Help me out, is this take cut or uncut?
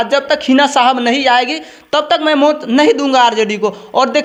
uncut